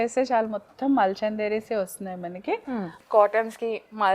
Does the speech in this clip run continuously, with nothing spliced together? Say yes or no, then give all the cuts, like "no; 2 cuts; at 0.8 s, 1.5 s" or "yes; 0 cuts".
no; 1 cut; at 3.0 s